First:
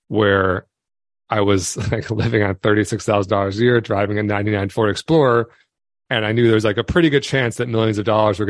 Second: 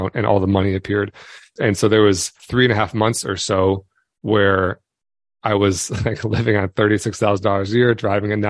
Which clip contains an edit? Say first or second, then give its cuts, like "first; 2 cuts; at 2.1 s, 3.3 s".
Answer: second; 2 cuts; at 1.5 s, 2.4 s